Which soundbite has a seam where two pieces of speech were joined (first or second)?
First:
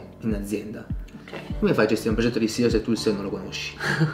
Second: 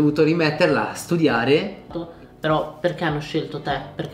second